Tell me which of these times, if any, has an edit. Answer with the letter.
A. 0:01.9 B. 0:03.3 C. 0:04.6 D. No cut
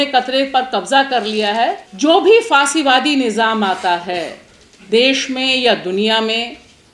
A